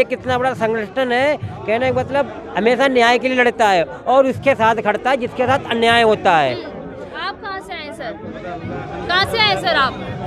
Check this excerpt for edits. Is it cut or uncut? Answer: uncut